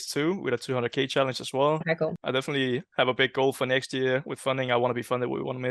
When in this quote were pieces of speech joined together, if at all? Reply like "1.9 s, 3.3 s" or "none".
2.2 s